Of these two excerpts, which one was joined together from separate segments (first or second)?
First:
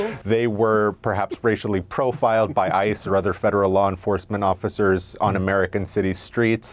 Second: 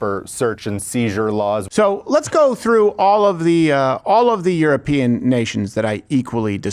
second